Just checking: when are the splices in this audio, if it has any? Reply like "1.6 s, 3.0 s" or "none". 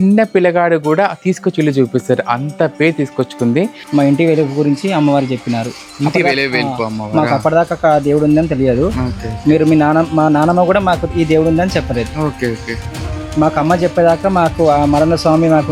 3.8 s